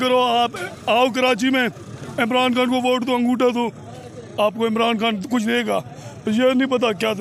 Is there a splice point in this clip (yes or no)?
no